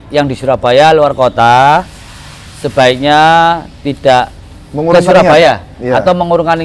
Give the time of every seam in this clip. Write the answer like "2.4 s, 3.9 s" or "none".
none